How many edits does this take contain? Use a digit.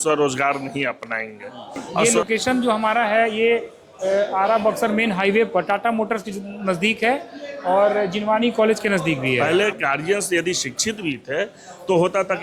2